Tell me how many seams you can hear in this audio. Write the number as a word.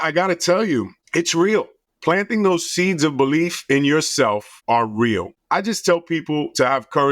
four